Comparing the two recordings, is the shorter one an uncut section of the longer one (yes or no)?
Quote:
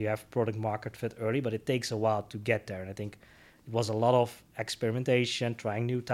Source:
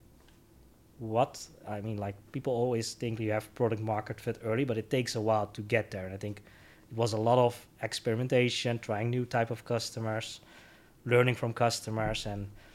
yes